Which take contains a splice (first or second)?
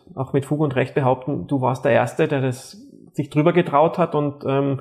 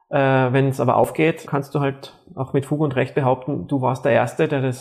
second